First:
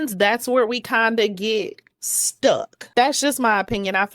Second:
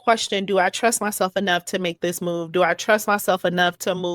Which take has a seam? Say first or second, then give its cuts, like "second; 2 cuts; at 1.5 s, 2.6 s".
first; 1 cut; at 2.8 s